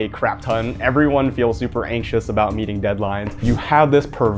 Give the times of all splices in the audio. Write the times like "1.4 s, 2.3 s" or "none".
3.4 s